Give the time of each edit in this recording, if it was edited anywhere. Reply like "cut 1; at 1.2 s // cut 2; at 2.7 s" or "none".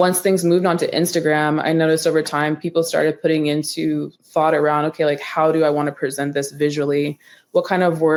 none